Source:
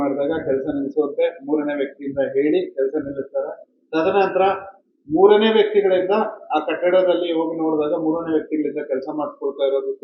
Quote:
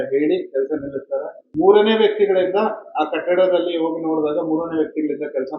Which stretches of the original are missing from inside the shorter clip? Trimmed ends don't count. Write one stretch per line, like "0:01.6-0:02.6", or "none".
0:03.6-0:04.9